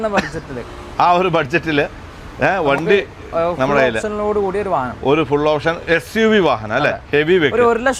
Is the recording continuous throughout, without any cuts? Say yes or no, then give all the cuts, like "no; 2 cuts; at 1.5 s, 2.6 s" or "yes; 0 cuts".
yes; 0 cuts